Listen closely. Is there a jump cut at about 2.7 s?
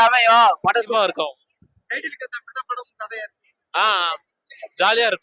no; 1 cut; at 0.9 s

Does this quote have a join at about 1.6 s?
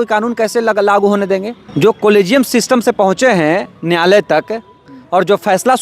yes; 1 cut; at 1.6 s

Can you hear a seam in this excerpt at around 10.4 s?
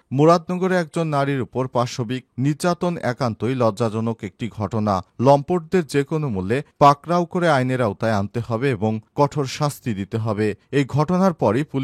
no; 0 cuts

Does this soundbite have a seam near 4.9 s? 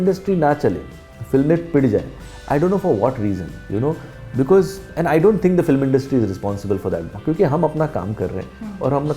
yes; 1 cut; at 4.9 s

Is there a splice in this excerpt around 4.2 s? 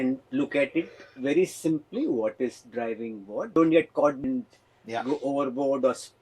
yes; 2 cuts; at 3.5 s, 4.2 s

